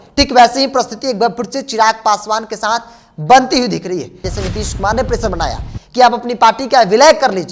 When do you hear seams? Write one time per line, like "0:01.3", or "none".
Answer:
0:04.3